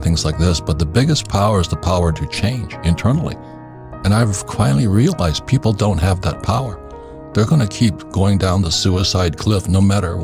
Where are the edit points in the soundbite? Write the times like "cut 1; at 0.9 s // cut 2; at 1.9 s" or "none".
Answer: none